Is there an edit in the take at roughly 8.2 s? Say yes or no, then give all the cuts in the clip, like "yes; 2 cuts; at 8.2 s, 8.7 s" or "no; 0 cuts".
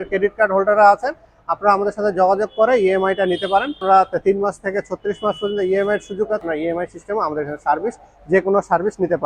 no; 2 cuts; at 3.8 s, 6.4 s